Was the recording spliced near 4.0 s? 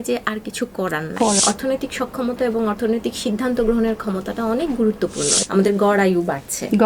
no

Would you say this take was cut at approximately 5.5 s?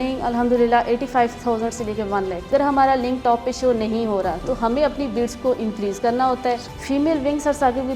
no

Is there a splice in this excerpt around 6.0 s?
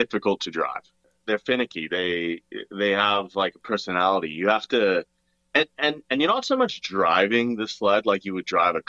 no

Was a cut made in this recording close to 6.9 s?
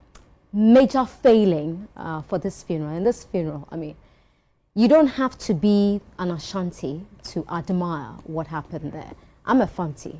no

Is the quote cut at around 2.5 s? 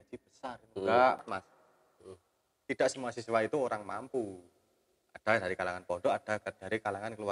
no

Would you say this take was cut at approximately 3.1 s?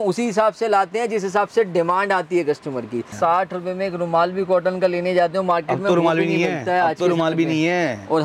yes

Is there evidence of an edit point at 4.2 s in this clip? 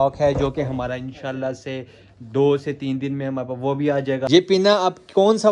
yes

